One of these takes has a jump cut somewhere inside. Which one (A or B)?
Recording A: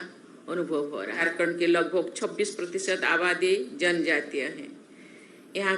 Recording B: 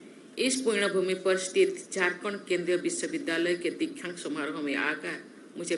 A